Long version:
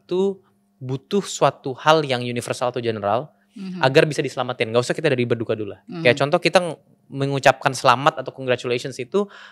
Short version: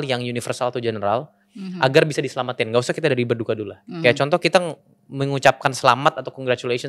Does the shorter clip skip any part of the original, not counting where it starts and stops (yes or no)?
no